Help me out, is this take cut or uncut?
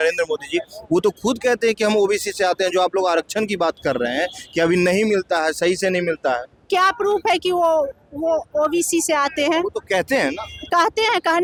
uncut